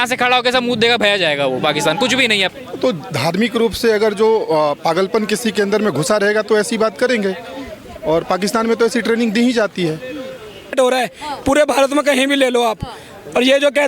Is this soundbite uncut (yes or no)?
no